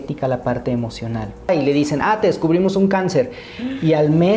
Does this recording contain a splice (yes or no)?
yes